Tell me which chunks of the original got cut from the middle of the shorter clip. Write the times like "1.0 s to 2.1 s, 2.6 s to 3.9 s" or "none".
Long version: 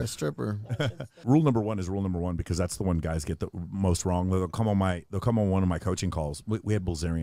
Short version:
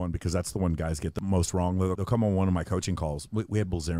3.4 s to 3.7 s, 4.5 s to 5.1 s

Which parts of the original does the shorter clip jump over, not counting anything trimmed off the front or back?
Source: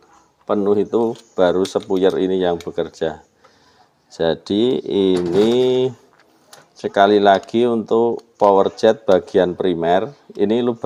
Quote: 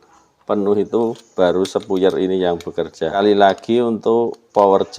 3.2 s to 7.0 s

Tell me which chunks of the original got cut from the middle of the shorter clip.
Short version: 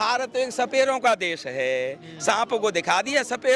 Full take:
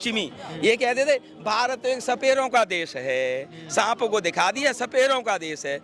none

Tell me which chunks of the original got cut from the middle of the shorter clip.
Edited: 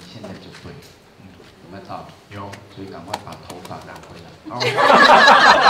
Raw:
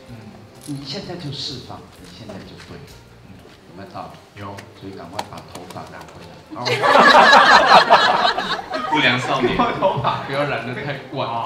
none

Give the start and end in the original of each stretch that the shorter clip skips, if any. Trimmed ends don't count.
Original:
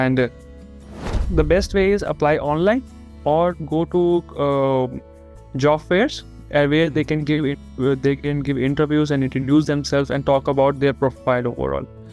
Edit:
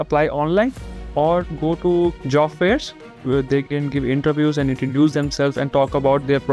4.3 s to 5.5 s, 6.4 s to 7.6 s

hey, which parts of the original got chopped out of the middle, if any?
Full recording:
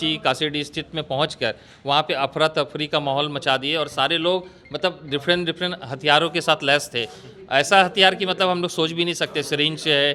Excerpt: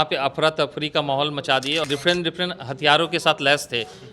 3.8 s to 5.1 s

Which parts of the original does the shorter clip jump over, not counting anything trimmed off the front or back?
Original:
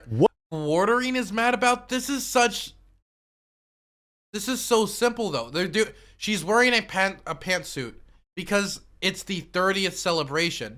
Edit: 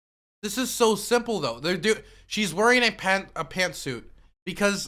none

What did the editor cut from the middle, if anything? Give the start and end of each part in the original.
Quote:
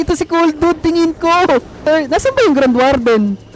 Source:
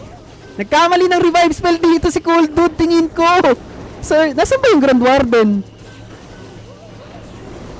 3.7 s to 4.0 s

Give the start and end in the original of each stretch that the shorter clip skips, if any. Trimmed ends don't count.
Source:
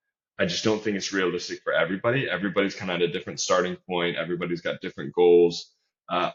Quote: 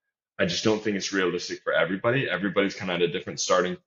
none

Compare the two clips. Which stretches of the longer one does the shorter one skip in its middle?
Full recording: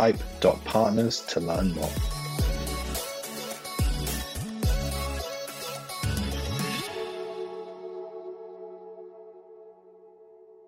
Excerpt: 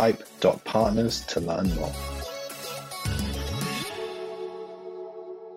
1.9 s to 4.9 s

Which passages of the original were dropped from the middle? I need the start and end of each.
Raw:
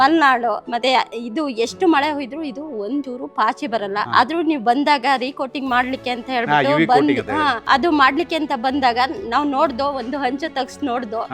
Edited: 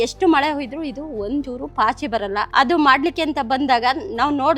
4.1 s to 7.6 s

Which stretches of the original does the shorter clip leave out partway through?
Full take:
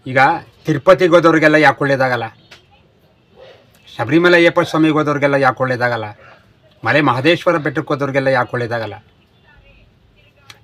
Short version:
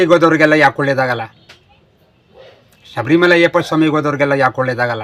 none

